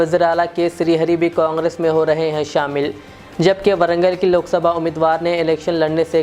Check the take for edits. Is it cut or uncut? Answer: uncut